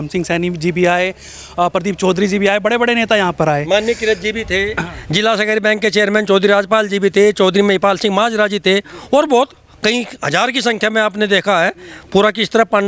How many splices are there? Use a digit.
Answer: 0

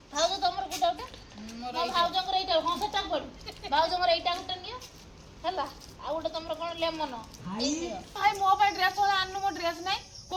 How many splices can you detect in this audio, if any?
1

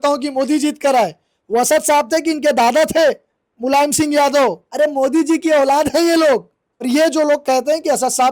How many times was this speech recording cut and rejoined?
2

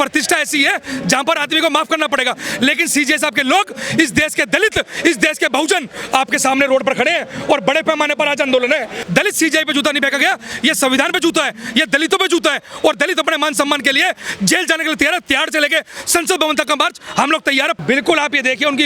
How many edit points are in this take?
2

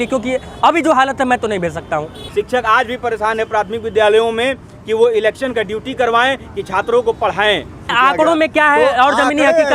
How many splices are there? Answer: 2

